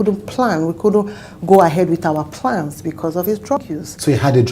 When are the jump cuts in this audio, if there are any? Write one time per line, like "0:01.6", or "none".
0:03.6